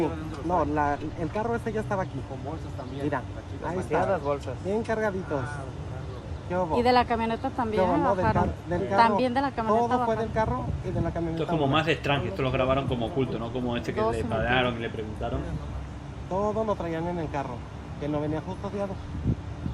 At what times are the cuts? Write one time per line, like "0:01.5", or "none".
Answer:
none